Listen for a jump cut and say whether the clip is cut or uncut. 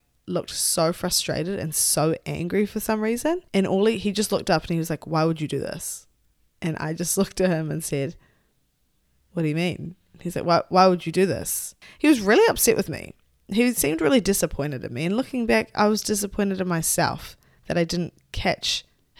cut